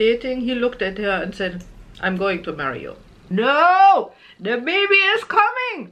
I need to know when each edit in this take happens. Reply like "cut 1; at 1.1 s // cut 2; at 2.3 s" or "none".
cut 1; at 3.2 s